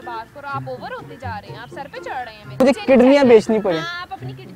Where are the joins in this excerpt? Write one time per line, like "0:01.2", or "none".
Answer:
0:02.6